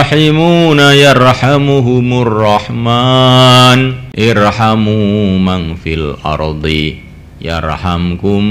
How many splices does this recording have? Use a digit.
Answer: 1